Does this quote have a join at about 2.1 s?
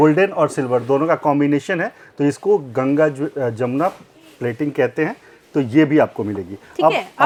no; 0 cuts

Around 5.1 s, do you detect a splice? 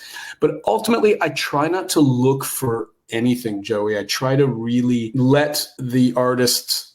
yes; 2 cuts; at 5.1 s, 5.7 s

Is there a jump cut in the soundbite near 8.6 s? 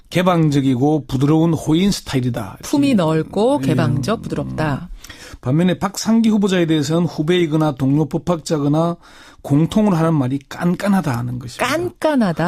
yes; 1 cut; at 8.6 s

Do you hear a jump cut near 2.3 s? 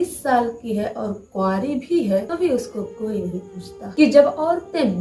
yes; 2 cuts; at 2.3 s, 3.8 s

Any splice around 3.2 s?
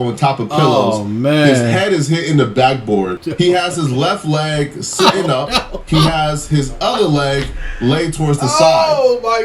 yes; 1 cut; at 3.2 s

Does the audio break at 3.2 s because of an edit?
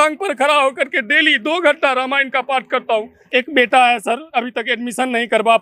yes; 1 cut; at 3.2 s

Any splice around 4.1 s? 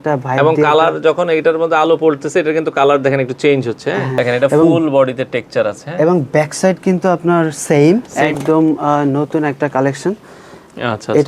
yes; 2 cuts; at 4.1 s, 8.2 s

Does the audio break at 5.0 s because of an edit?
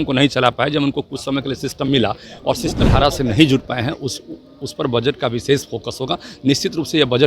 no; 1 cut; at 2.8 s

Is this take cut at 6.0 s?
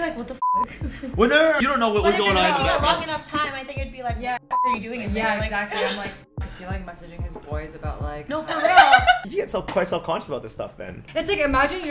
no; 3 cuts; at 1.6 s, 9.2 s, 11.0 s

